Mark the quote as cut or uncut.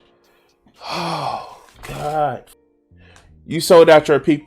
cut